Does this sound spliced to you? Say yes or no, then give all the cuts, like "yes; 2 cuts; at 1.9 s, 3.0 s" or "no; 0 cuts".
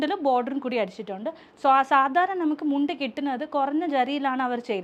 no; 0 cuts